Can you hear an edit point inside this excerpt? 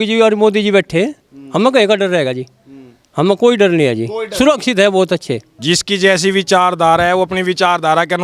yes; 1 cut; at 5.5 s

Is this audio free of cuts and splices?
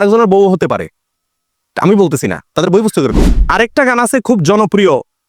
no; 1 cut; at 3.3 s

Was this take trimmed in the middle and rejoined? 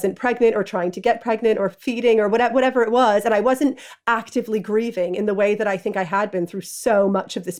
no; 0 cuts

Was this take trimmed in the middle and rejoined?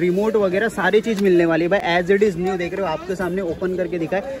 no; 0 cuts

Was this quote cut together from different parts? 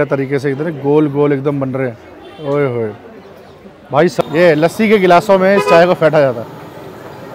yes; 1 cut; at 4.2 s

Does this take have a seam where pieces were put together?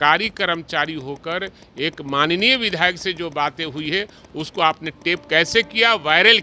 no; 0 cuts

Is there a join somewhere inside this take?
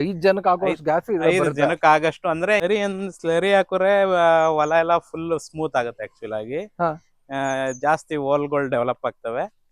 yes; 1 cut; at 2.6 s

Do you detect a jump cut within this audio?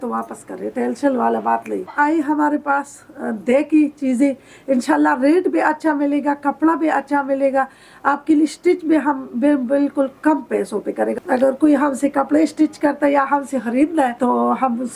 yes; 3 cuts; at 1.9 s, 11.2 s, 14.1 s

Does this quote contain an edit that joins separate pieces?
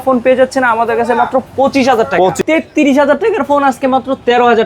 yes; 1 cut; at 2.4 s

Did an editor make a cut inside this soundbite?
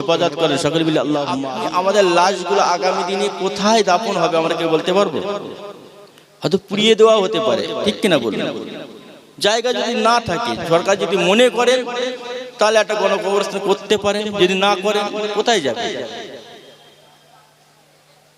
yes; 1 cut; at 1.4 s

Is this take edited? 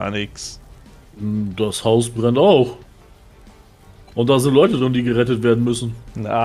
no; 0 cuts

